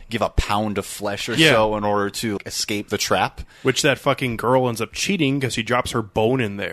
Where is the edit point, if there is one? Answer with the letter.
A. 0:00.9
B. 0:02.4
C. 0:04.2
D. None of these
B